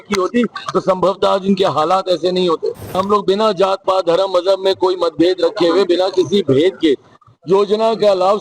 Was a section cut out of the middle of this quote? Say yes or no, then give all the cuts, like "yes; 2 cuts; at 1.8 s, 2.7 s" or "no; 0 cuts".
yes; 1 cut; at 3.0 s